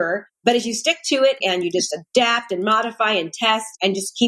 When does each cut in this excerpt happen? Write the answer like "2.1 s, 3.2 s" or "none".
1.4 s